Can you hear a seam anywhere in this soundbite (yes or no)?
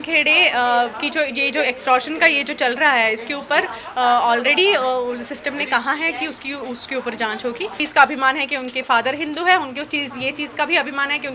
yes